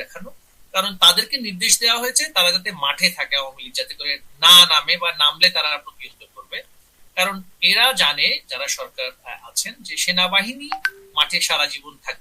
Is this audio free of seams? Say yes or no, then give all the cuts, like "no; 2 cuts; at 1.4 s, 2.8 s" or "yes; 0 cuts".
yes; 0 cuts